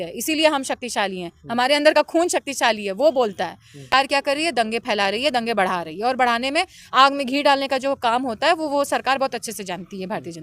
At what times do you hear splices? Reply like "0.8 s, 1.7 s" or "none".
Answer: 3.9 s